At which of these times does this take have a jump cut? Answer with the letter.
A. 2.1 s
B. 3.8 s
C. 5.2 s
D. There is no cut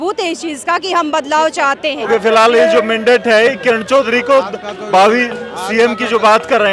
D